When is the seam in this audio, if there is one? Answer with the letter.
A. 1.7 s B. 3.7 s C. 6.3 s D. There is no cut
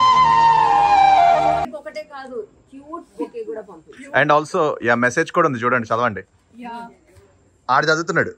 D